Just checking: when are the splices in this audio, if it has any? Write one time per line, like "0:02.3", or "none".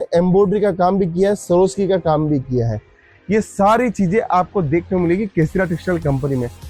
none